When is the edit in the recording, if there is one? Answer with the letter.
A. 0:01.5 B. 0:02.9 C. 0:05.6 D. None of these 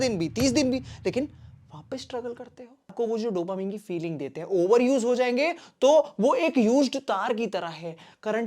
B